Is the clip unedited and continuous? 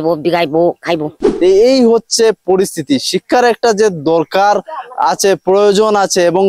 no; 1 cut; at 1.4 s

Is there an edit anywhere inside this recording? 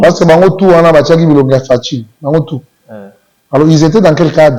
no; 0 cuts

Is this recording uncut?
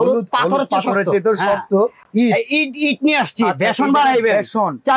yes; 0 cuts

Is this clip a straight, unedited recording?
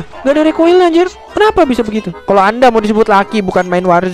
no; 1 cut; at 2.1 s

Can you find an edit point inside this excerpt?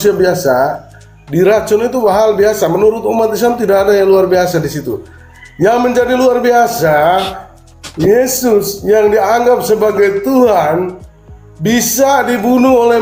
no; 0 cuts

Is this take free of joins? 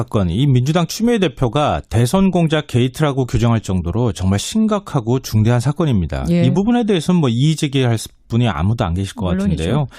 no; 1 cut; at 1.3 s

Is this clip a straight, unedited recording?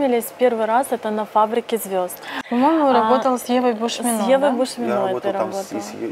yes; 0 cuts

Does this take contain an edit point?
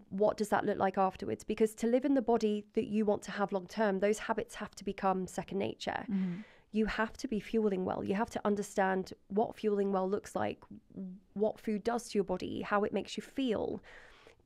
no; 0 cuts

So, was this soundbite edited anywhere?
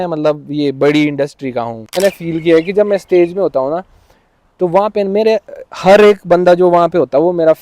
yes; 1 cut; at 1.9 s

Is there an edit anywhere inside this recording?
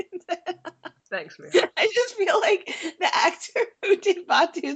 yes; 1 cut; at 0.9 s

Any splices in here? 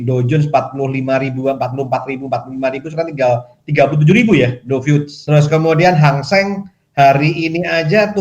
yes; 1 cut; at 5.1 s

